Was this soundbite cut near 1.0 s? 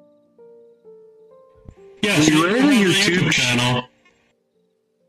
no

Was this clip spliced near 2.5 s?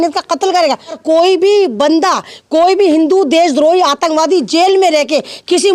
no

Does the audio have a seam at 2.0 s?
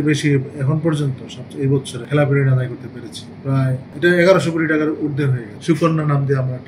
yes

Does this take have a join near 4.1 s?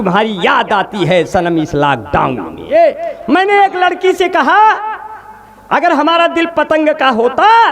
no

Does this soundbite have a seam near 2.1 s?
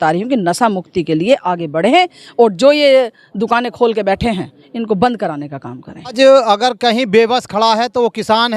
no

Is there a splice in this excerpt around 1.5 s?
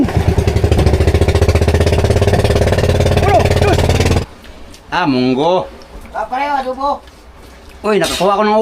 no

